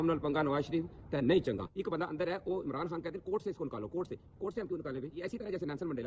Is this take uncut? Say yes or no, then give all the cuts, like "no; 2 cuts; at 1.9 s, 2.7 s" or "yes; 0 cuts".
yes; 0 cuts